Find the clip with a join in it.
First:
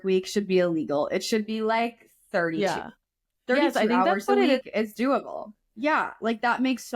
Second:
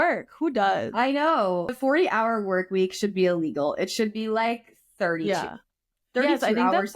second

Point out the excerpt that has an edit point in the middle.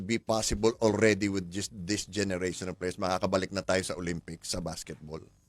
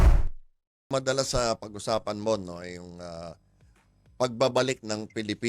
second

